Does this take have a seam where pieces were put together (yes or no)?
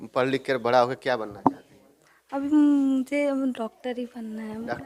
no